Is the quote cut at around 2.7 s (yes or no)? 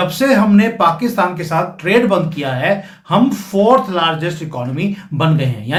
no